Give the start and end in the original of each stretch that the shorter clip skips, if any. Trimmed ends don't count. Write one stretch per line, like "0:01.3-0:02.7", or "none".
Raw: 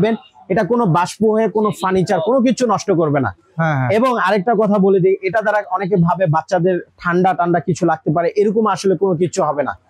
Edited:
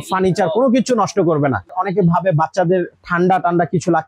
0:03.5-0:05.7